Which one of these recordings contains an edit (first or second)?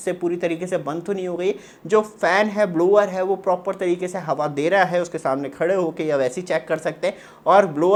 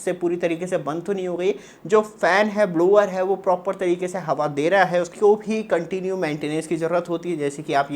second